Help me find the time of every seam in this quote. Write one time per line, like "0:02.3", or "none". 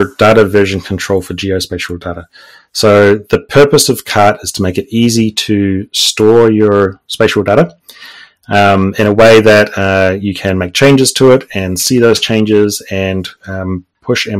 none